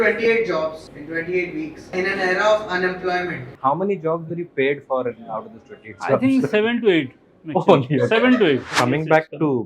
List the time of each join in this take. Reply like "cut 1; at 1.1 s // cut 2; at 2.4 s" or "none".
cut 1; at 0.8 s // cut 2; at 1.9 s // cut 3; at 3.6 s // cut 4; at 8.7 s